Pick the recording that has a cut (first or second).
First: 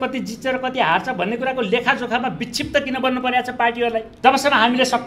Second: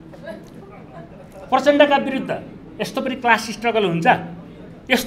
first